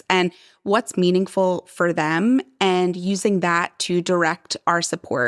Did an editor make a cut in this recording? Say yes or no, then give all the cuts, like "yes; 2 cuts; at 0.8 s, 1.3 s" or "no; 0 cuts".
no; 0 cuts